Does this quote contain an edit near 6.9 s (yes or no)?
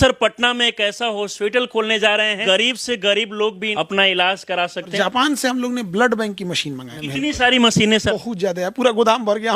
yes